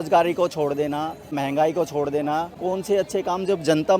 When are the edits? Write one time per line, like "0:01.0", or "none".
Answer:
0:01.4
0:02.5